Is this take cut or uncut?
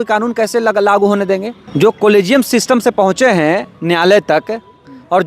cut